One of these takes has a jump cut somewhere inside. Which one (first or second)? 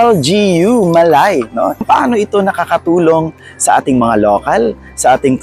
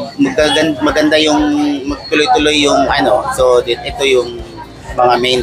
first